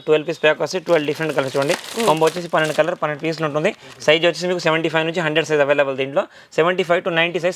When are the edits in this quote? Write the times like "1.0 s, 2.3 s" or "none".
none